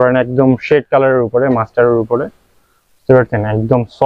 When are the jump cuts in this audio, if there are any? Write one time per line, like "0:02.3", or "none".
none